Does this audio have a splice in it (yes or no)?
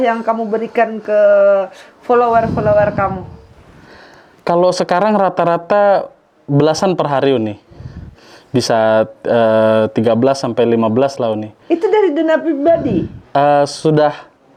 no